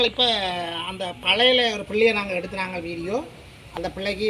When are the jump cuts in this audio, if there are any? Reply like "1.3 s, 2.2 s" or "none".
none